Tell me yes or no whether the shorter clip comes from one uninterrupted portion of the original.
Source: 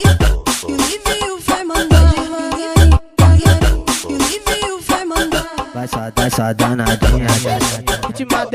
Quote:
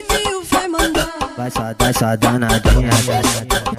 no